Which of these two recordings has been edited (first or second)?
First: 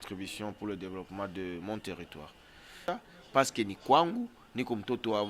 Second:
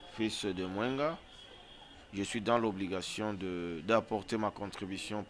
first